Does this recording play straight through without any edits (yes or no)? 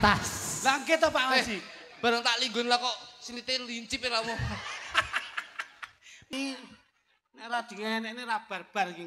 no